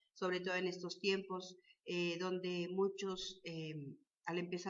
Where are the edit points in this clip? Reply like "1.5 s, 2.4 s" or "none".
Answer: 2.8 s